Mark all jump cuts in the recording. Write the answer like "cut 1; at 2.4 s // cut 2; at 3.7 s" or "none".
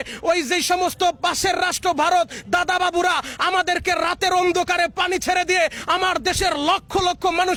none